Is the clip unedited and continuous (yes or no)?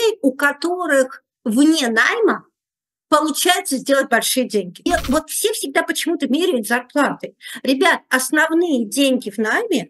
no